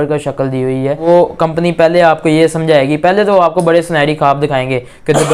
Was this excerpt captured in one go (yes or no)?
no